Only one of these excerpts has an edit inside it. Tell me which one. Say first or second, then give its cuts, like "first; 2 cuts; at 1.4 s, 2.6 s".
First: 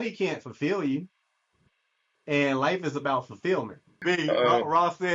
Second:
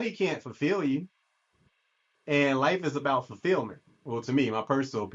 first; 1 cut; at 3.9 s